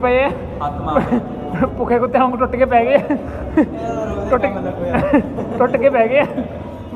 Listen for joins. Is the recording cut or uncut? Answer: uncut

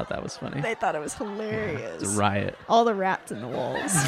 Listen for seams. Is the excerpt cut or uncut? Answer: uncut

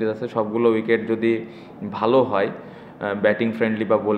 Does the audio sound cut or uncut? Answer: uncut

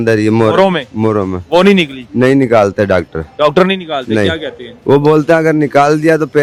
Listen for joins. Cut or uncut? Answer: uncut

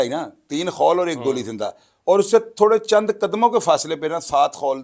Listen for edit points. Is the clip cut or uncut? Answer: uncut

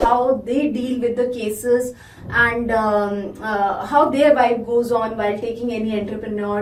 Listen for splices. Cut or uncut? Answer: uncut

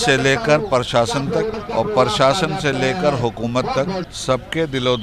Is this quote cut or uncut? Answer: cut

